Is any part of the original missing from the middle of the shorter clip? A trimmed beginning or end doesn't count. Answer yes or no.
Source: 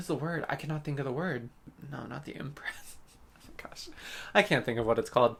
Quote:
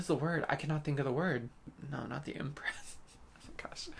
no